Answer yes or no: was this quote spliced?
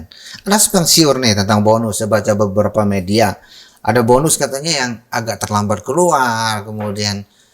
no